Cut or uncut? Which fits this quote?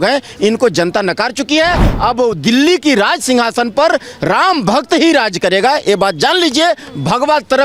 uncut